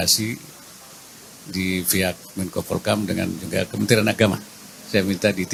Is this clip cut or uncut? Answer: uncut